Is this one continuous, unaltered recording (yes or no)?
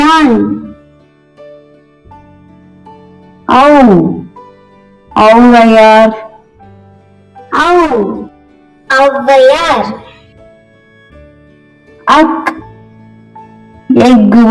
no